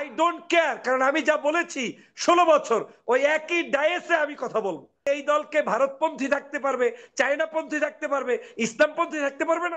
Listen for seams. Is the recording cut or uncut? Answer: cut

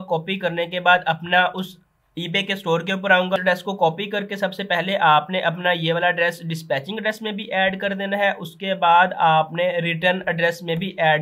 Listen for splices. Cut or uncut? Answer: cut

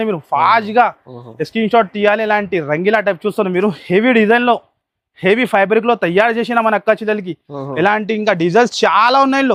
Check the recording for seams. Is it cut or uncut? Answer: uncut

